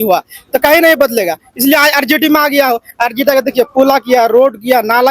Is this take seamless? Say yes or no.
yes